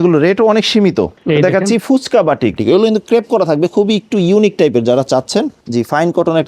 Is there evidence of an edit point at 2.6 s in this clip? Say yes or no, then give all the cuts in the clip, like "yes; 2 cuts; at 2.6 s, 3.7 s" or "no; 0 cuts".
yes; 3 cuts; at 1.2 s, 2.6 s, 5.6 s